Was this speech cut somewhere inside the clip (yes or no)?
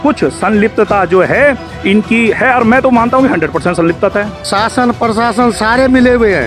yes